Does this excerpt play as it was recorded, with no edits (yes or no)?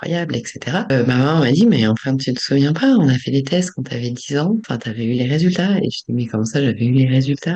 no